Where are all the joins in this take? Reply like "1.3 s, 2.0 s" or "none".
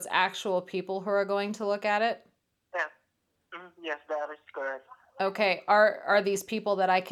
none